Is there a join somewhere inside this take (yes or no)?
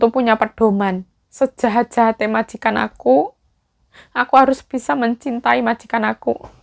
no